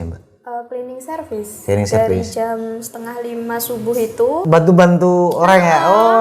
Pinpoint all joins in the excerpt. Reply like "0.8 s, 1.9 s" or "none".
4.4 s